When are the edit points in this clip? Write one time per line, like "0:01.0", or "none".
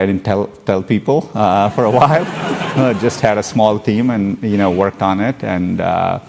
none